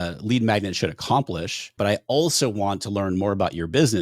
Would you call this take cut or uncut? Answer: cut